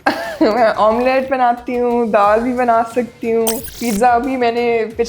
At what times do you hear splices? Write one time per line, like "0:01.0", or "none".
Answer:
0:03.7